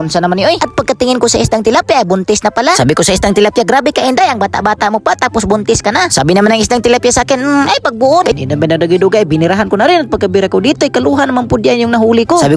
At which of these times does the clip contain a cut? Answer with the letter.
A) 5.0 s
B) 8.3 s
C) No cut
B